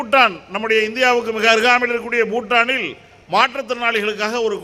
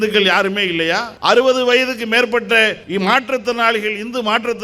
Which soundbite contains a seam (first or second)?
second